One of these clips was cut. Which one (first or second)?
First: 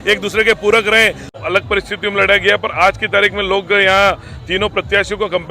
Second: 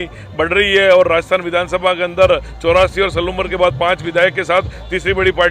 first